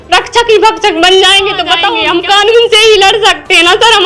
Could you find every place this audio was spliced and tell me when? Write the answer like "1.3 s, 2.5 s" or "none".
1.9 s